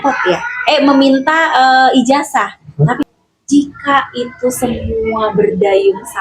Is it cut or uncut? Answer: cut